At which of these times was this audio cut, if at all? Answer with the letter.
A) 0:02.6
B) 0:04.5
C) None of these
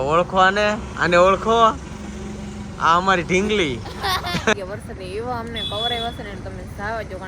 B